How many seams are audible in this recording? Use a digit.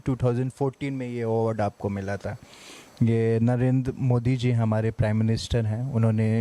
0